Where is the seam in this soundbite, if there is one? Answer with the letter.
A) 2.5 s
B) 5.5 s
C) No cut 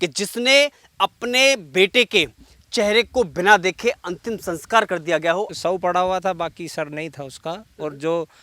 B